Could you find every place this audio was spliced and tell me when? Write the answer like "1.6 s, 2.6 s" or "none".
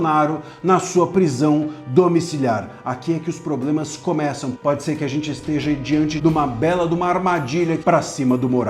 4.5 s, 6.1 s, 7.8 s